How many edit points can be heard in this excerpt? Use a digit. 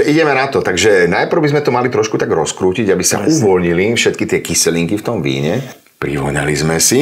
1